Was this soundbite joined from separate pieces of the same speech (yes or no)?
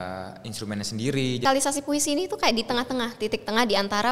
yes